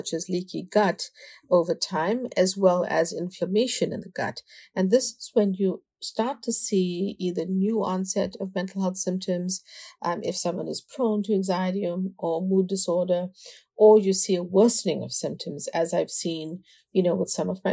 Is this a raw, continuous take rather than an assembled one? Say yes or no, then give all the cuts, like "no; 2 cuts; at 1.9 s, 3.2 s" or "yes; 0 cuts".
yes; 0 cuts